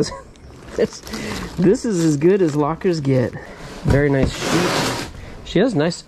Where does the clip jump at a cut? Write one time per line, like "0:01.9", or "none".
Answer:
0:03.4